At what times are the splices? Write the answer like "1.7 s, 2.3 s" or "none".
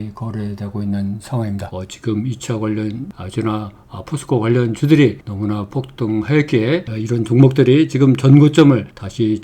1.7 s, 3.1 s, 6.9 s